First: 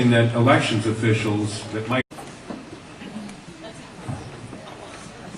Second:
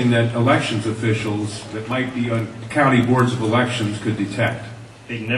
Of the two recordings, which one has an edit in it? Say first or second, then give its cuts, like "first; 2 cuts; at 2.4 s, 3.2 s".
second; 1 cut; at 2.1 s